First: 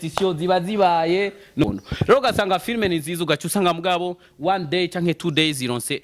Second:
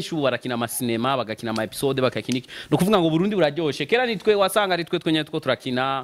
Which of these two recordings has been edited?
first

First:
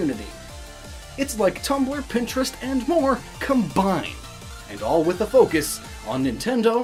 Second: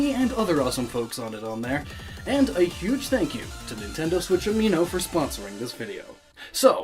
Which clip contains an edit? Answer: second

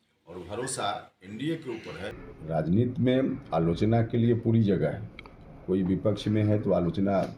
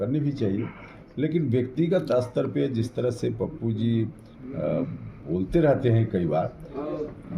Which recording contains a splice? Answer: first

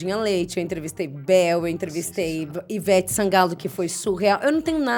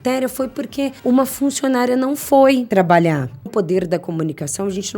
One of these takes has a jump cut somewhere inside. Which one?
second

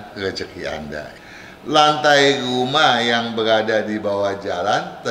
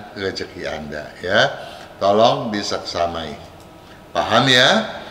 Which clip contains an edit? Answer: first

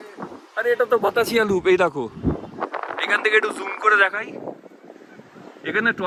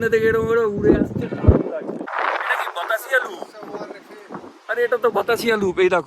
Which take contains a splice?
second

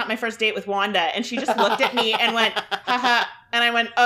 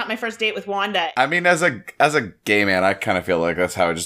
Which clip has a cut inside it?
second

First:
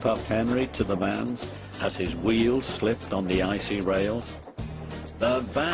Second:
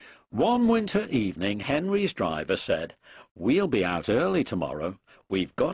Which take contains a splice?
second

